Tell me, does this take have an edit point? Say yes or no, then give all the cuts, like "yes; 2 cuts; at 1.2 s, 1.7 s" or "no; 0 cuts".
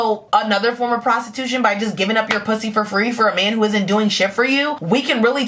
no; 0 cuts